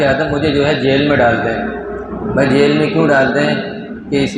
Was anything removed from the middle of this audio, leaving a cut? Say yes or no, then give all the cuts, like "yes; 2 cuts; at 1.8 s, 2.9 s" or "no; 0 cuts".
no; 0 cuts